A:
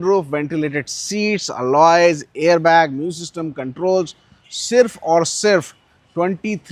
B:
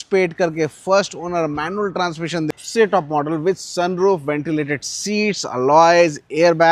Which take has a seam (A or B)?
B